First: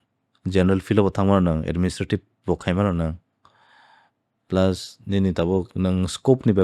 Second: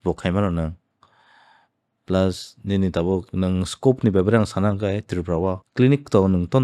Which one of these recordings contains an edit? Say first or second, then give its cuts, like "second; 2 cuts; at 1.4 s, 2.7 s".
second; 1 cut; at 5.6 s